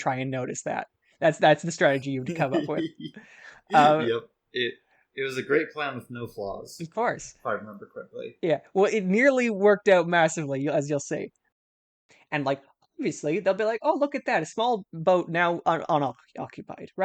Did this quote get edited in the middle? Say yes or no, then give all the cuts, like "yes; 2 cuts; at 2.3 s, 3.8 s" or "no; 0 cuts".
yes; 1 cut; at 11.7 s